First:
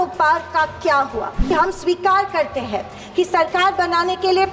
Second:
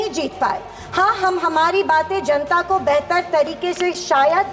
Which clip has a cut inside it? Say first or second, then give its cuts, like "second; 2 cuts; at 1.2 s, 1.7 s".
first; 1 cut; at 1.5 s